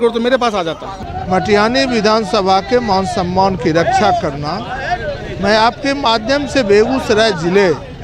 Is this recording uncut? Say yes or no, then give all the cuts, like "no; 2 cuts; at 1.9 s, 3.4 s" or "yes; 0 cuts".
no; 1 cut; at 0.9 s